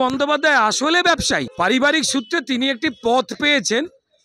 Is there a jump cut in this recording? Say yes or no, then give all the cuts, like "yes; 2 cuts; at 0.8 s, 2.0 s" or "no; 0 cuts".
yes; 1 cut; at 1.5 s